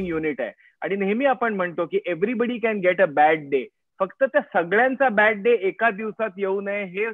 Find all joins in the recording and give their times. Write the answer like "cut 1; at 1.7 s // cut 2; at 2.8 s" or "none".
none

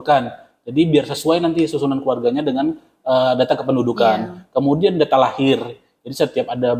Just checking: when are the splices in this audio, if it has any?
none

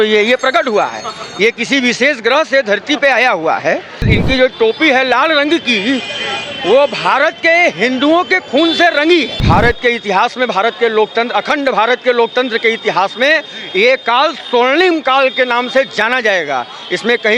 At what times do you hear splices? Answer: cut 1; at 4.1 s // cut 2; at 9.4 s

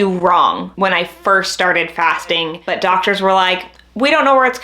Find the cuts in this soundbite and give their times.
cut 1; at 2.6 s

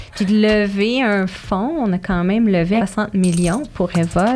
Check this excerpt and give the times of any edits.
cut 1; at 2.8 s

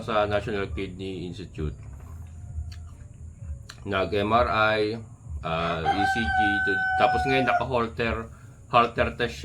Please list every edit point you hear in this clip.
none

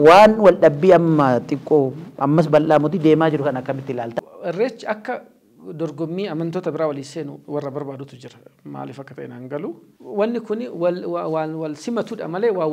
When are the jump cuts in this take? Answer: cut 1; at 4.2 s // cut 2; at 9.9 s

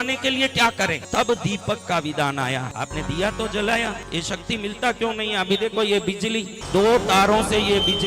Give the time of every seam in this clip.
cut 1; at 1.0 s // cut 2; at 2.7 s // cut 3; at 4.0 s // cut 4; at 6.6 s

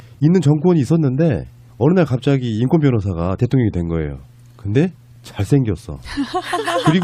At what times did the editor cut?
none

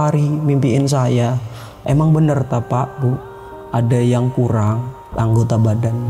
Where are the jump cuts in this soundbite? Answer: cut 1; at 1.7 s // cut 2; at 5.0 s

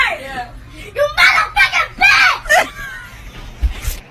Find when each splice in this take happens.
none

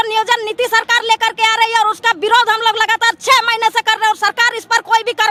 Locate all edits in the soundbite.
none

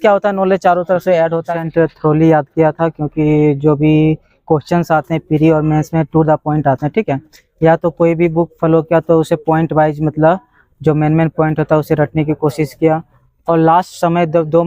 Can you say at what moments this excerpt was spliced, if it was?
cut 1; at 1.6 s

